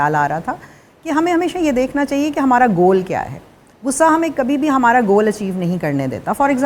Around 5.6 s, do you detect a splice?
no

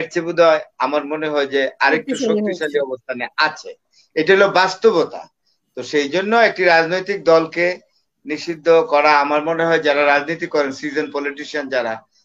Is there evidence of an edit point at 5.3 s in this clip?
no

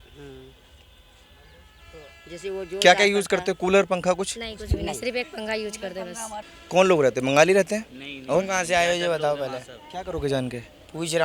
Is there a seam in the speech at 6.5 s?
yes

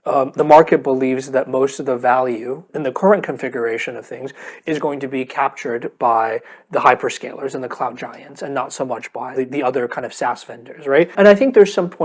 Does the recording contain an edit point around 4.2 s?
no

